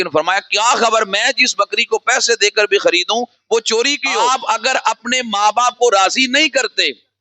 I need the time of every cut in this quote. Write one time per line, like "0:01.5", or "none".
0:04.0